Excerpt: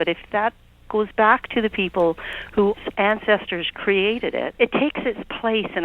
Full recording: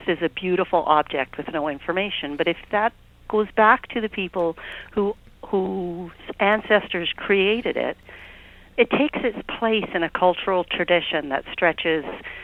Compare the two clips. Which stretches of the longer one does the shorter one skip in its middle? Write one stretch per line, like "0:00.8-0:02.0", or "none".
0:05.2-0:06.3
0:07.9-0:08.7